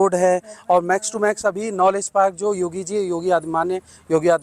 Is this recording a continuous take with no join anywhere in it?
yes; 0 cuts

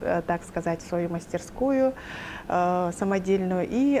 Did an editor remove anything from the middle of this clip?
no; 0 cuts

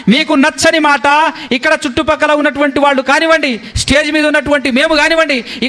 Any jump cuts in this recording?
no; 0 cuts

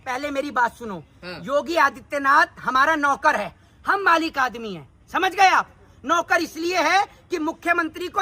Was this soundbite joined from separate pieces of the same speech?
no; 0 cuts

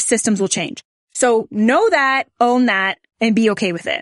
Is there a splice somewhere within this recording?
no; 0 cuts

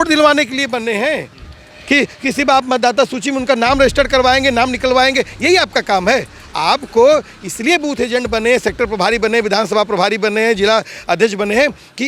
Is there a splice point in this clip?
no; 0 cuts

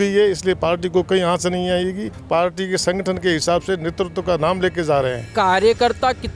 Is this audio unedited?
no; 2 cuts; at 2.1 s, 5.3 s

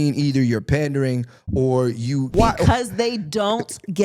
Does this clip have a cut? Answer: yes; 1 cut; at 2.3 s

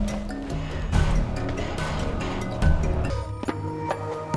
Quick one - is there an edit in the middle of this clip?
yes; 1 cut; at 3.1 s

